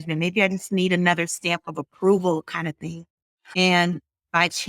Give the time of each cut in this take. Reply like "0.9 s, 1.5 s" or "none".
3.4 s